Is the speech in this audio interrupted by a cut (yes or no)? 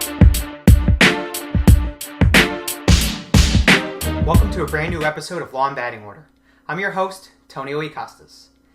yes